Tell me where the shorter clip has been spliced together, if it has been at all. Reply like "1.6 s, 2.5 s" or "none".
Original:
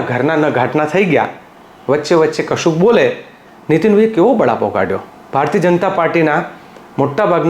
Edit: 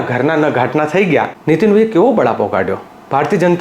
1.3 s

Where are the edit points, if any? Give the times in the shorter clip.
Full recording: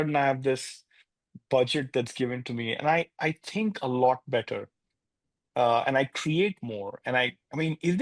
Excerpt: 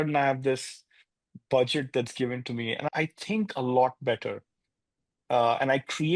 2.9 s

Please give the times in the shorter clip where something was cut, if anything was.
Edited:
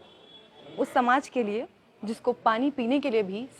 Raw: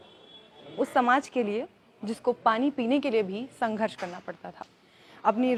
none

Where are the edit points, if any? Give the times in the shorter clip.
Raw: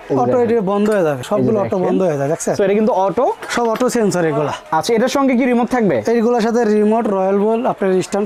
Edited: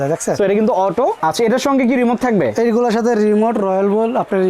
1.2 s

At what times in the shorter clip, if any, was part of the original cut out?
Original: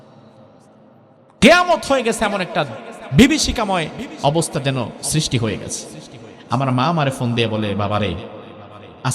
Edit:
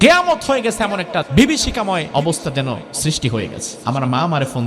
1.3 s, 2.1 s, 3.7 s

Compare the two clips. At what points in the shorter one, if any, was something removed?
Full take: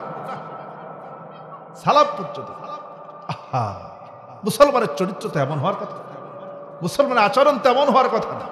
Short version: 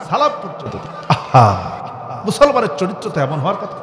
0.9 s

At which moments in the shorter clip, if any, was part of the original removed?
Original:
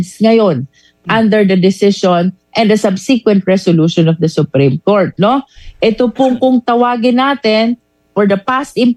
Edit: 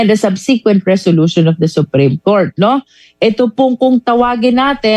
none

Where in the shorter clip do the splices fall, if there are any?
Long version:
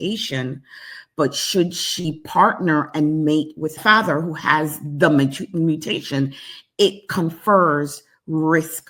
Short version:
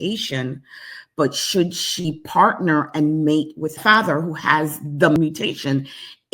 5.2 s

